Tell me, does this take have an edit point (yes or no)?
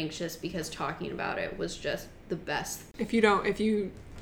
yes